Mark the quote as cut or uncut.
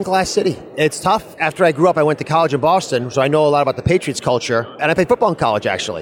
cut